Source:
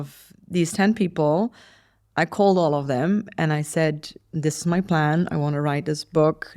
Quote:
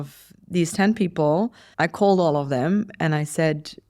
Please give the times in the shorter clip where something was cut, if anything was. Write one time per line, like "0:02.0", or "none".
0:01.6